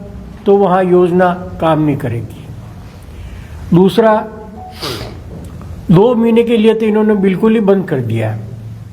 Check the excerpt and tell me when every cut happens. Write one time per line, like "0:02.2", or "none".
none

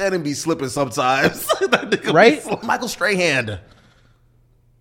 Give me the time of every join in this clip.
0:02.6

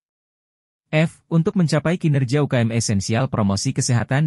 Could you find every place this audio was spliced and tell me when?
none

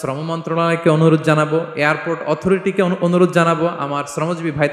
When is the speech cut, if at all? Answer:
none

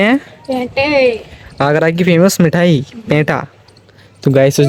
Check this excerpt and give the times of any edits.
none

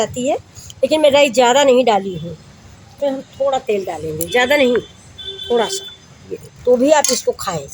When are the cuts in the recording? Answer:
0:03.0
0:06.5

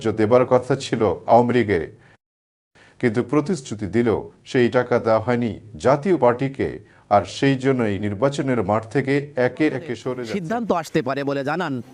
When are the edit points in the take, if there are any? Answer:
0:10.1

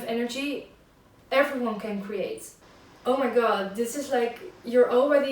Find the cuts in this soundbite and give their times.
0:02.5

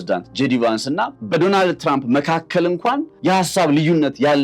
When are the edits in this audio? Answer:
0:01.2
0:03.1

